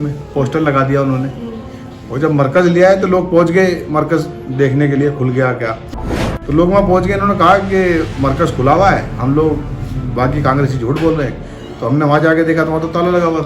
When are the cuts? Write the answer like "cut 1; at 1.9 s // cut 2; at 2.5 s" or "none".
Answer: cut 1; at 6.0 s

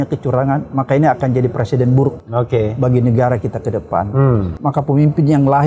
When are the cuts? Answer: cut 1; at 2.2 s // cut 2; at 4.5 s

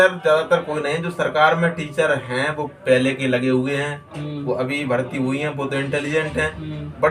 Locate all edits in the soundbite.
none

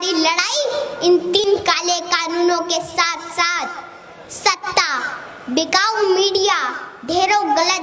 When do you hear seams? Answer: cut 1; at 1.4 s

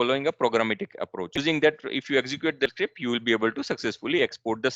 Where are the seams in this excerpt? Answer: cut 1; at 1.4 s // cut 2; at 2.7 s

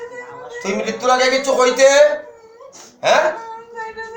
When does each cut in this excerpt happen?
none

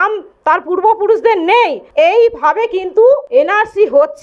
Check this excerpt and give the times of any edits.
cut 1; at 1.9 s // cut 2; at 3.2 s

